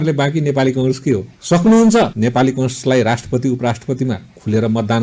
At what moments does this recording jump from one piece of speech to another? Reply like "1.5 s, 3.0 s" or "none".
none